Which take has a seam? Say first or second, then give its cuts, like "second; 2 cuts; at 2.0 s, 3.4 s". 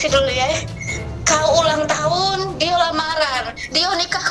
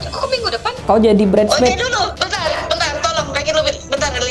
second; 2 cuts; at 0.8 s, 2.1 s